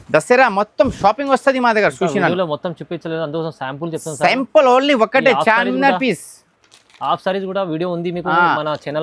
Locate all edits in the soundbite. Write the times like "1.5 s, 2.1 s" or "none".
none